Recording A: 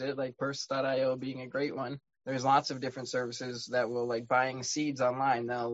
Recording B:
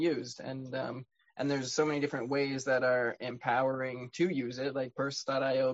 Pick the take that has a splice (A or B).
A